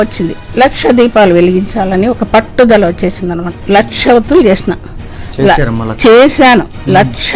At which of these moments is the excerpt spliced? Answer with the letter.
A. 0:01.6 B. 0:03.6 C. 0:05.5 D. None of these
B